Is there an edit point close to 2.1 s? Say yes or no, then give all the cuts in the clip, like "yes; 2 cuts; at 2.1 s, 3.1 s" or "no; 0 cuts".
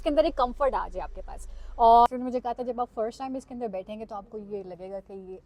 yes; 1 cut; at 2.1 s